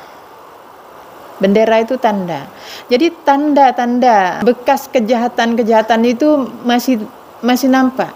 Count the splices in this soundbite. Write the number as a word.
one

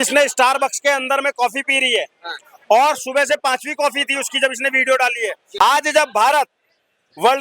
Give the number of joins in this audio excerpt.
one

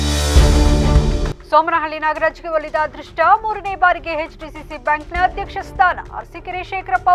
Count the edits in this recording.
zero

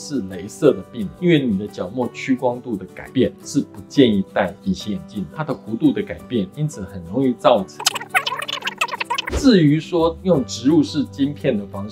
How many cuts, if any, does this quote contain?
one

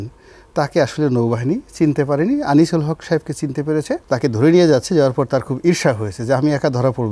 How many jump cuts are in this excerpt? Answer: one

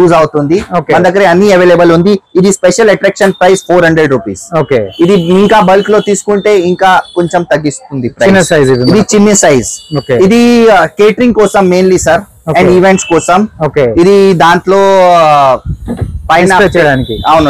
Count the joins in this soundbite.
zero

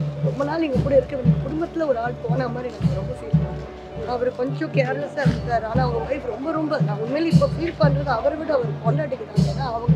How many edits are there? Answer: one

